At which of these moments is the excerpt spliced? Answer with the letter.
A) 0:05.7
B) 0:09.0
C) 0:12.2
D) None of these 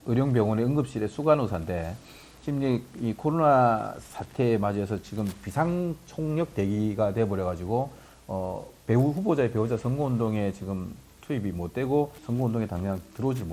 C